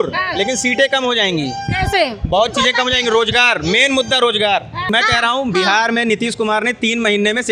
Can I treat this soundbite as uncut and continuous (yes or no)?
no